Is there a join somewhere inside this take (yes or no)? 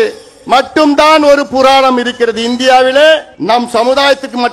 yes